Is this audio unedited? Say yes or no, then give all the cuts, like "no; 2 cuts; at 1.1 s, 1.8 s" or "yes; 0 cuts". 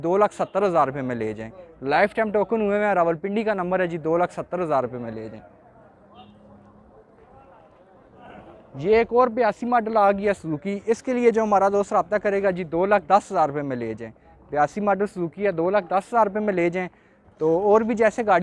yes; 0 cuts